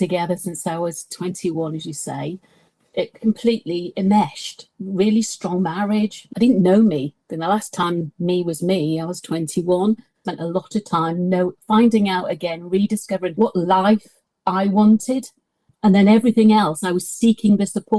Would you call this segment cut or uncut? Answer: cut